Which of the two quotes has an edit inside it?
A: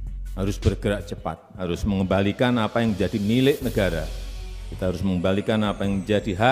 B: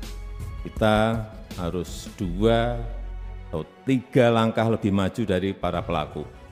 A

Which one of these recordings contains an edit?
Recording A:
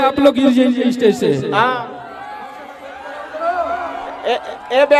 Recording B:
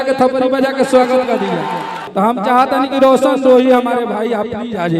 B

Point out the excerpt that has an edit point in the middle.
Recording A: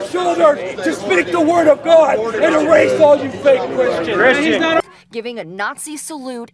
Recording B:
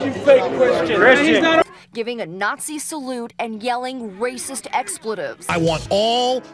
B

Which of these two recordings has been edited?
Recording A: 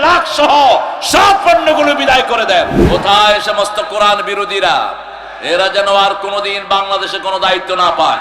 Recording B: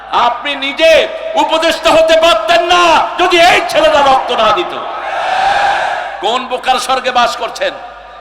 A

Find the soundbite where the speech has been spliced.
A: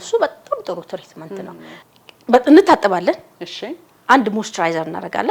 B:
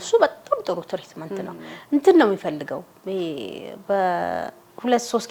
A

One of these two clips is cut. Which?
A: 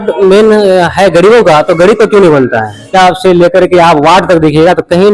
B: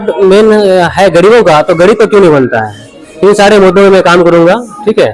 A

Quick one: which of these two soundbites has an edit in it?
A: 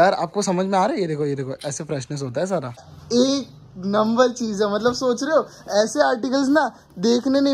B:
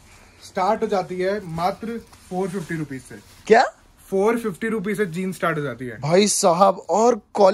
A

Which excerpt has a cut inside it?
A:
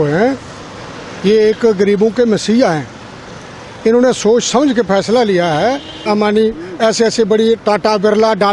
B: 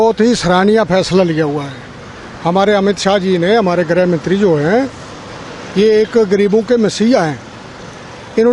A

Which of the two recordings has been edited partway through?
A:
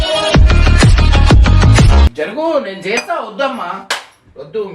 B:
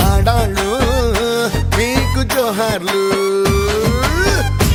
A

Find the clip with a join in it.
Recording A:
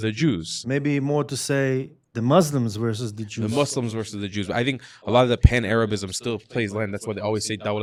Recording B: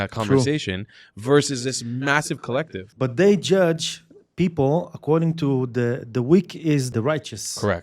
B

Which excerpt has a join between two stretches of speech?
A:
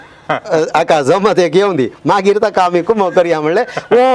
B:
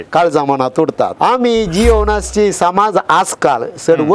B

